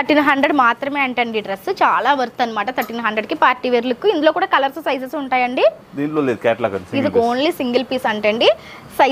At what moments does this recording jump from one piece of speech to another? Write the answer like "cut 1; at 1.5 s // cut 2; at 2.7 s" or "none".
none